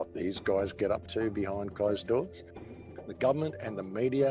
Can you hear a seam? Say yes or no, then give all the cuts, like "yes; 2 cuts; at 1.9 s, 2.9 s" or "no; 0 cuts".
yes; 1 cut; at 2.6 s